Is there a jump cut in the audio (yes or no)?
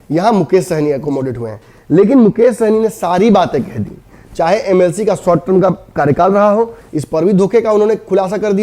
no